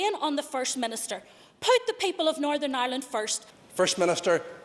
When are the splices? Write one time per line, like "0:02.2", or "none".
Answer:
0:03.4